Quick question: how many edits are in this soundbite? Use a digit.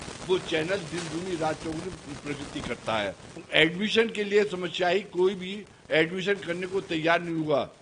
1